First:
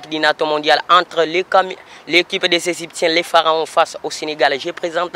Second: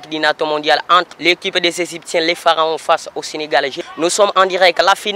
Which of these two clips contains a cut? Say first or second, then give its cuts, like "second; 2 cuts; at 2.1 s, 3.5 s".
second; 2 cuts; at 1.1 s, 3.8 s